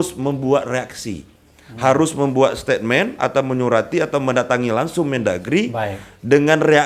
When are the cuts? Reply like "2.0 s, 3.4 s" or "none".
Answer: none